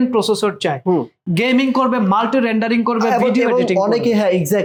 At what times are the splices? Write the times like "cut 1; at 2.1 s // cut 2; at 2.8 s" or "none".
none